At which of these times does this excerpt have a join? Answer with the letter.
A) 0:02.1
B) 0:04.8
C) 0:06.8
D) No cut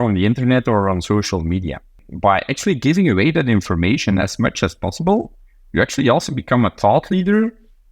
A